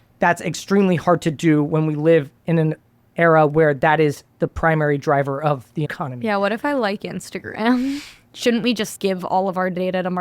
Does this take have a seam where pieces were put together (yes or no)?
yes